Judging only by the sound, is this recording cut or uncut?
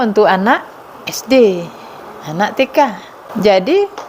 cut